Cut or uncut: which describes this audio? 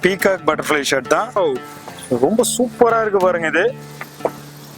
cut